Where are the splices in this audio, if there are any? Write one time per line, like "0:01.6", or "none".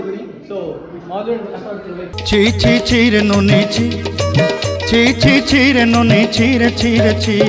none